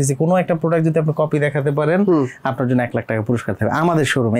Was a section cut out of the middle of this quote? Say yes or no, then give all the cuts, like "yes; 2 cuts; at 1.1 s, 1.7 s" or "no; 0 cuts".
no; 0 cuts